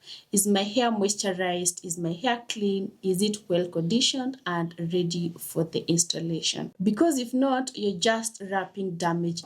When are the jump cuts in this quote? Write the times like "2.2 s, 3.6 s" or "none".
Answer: 6.7 s